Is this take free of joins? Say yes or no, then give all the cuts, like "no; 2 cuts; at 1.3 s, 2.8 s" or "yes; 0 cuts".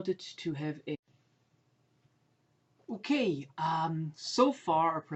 yes; 0 cuts